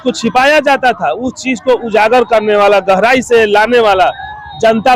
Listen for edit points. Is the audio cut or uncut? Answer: uncut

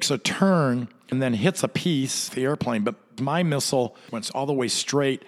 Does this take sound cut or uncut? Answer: cut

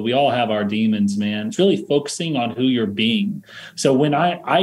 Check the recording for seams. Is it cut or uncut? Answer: cut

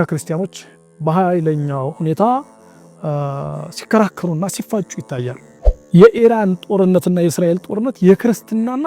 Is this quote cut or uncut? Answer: cut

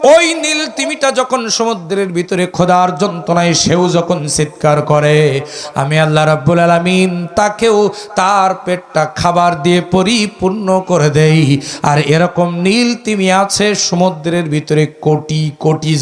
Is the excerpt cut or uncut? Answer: uncut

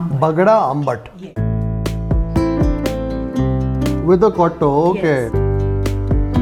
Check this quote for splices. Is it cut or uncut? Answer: uncut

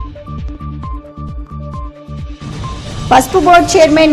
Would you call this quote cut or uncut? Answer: cut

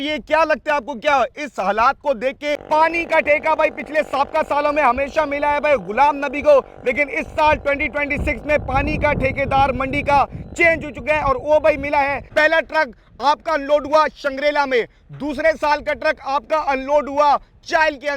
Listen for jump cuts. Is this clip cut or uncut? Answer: cut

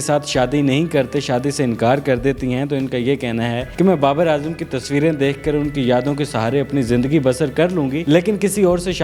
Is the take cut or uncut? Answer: uncut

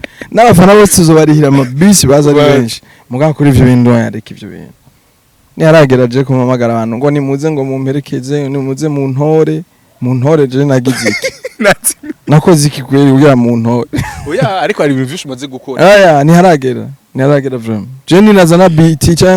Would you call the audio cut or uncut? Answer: uncut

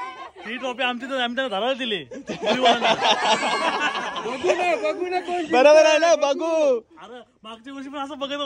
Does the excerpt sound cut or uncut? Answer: uncut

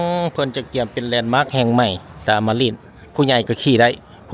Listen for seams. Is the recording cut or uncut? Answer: cut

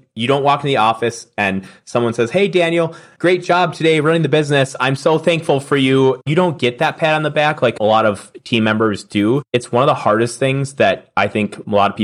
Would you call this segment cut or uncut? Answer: cut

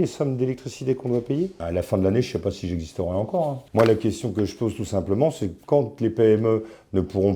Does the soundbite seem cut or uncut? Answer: cut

